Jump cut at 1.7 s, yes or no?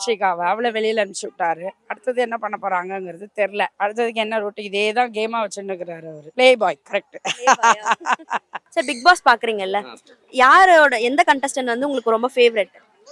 no